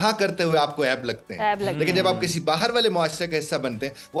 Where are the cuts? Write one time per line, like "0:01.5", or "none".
none